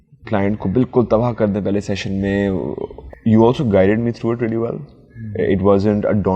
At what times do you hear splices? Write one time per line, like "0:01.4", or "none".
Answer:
0:02.9

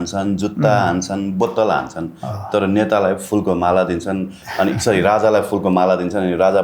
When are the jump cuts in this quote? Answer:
none

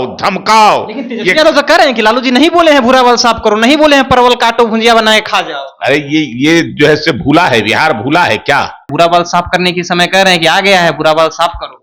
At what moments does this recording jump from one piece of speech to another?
0:08.9

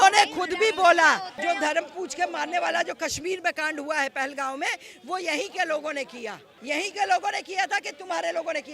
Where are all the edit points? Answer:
0:01.3
0:06.5

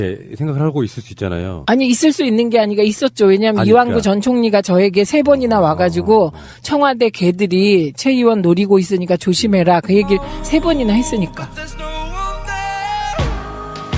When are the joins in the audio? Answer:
0:11.0

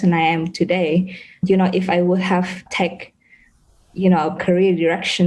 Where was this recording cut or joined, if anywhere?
0:01.4
0:02.7
0:04.4

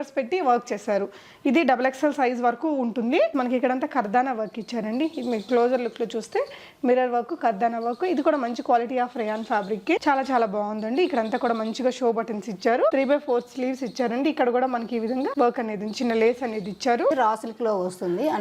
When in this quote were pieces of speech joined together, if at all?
0:03.3
0:10.0
0:17.1

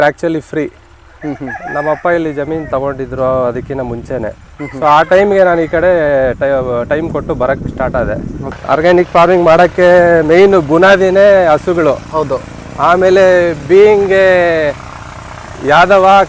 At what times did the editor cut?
0:08.6

